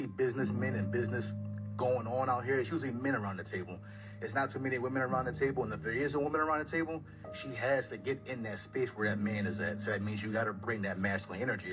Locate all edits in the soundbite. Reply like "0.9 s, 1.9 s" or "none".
none